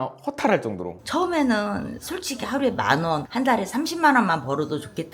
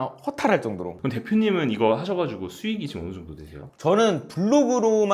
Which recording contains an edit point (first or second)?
first